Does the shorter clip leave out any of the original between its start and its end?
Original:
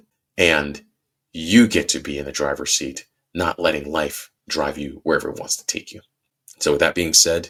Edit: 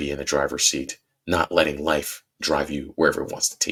no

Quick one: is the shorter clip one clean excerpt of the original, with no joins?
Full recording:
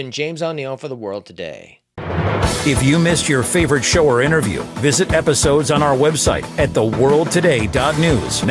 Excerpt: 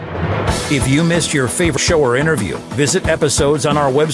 no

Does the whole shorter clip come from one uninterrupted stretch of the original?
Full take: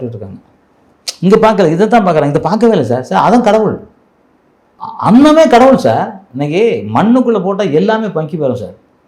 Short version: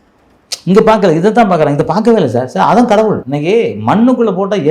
no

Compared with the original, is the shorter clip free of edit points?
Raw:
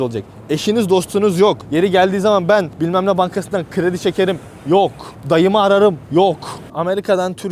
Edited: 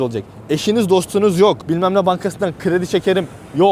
no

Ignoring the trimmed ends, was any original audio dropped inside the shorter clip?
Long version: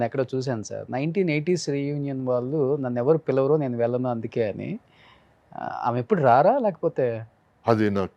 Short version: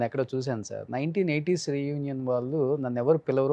no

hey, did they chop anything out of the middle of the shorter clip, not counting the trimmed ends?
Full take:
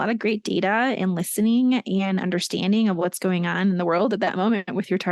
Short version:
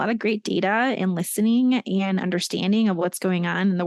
no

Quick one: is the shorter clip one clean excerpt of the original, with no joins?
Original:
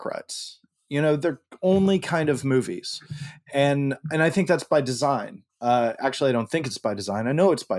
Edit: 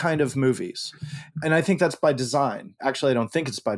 no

